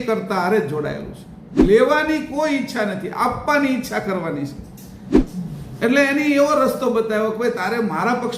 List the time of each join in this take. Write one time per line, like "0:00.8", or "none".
0:01.5
0:05.0